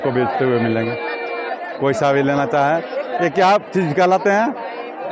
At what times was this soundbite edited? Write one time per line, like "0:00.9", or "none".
none